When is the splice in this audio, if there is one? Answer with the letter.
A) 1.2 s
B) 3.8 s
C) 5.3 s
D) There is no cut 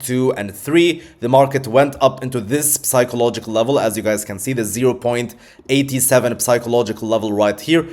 D